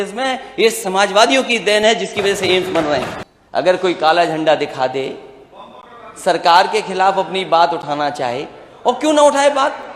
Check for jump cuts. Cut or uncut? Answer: cut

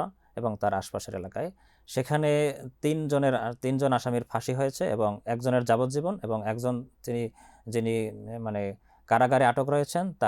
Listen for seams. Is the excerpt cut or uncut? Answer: uncut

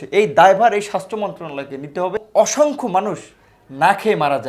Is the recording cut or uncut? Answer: cut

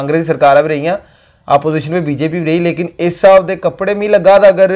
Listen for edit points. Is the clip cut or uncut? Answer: uncut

